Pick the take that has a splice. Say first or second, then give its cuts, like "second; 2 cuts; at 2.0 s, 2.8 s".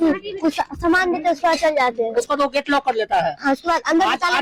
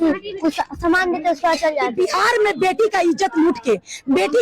second; 1 cut; at 1.9 s